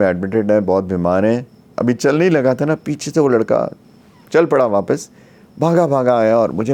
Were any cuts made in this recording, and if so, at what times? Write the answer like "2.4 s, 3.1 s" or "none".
1.6 s